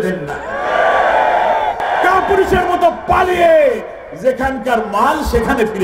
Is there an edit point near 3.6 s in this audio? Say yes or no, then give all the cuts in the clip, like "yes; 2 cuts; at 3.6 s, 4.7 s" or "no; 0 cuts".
no; 1 cut; at 1.8 s